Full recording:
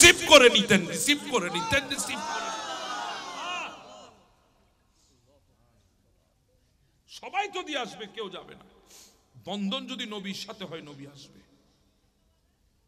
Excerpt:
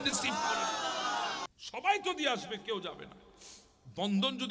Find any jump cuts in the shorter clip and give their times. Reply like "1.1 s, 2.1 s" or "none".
1.4 s